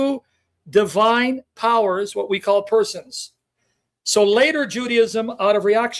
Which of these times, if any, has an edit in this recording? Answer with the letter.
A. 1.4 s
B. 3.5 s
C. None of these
C